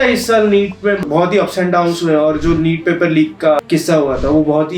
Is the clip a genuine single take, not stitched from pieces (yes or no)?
no